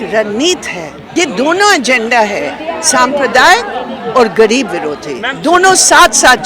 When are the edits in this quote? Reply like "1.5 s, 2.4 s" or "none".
1.0 s